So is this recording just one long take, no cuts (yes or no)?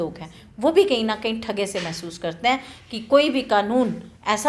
yes